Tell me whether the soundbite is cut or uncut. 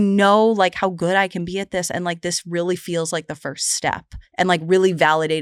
uncut